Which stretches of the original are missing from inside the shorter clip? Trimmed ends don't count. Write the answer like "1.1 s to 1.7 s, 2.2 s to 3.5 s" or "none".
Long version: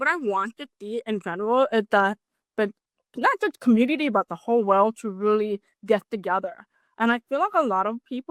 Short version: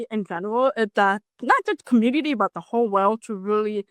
2.2 s to 3.0 s